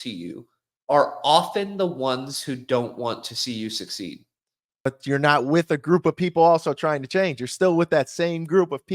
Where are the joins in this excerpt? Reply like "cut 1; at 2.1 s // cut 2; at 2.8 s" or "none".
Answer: cut 1; at 4.9 s